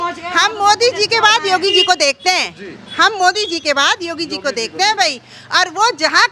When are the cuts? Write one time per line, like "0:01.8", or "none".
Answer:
none